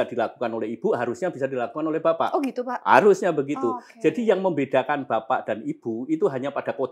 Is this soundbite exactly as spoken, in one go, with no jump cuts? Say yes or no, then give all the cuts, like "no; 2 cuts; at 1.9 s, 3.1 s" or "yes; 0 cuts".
yes; 0 cuts